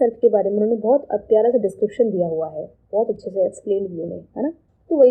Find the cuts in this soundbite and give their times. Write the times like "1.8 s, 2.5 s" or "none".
none